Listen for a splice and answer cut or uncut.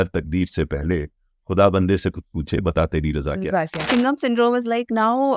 cut